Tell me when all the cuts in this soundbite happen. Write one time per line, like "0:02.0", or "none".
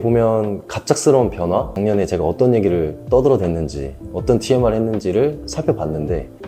0:01.7